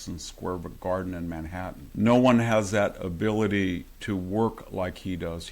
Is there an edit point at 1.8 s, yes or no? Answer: yes